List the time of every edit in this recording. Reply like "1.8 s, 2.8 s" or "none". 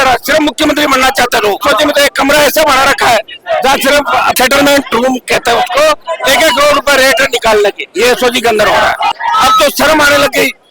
1.6 s, 4.4 s, 6.1 s, 9.2 s